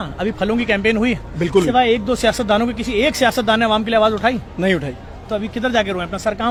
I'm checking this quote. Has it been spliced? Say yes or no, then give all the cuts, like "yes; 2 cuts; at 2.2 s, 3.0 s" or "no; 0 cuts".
no; 0 cuts